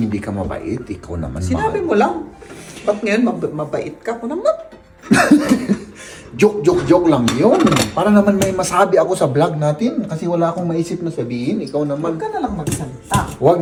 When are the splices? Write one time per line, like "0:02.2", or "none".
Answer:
none